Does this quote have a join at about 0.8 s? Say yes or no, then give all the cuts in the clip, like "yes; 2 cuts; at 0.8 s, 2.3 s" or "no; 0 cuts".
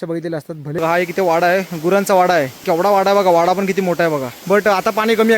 yes; 3 cuts; at 0.8 s, 2.6 s, 4.3 s